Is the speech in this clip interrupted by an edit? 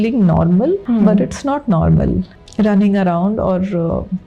yes; 2 cuts; at 0.8 s, 2.4 s

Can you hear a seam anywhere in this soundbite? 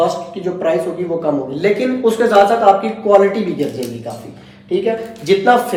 no; 0 cuts

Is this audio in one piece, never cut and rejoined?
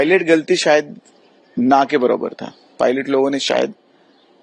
yes; 0 cuts

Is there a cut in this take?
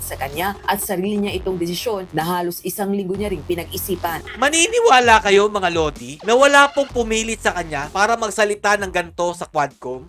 no; 0 cuts

